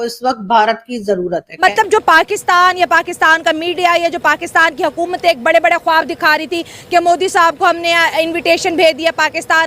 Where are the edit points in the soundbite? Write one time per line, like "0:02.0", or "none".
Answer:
0:01.5